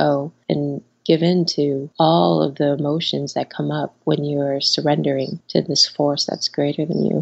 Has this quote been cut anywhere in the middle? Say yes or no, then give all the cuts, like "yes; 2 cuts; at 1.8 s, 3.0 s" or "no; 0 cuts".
no; 0 cuts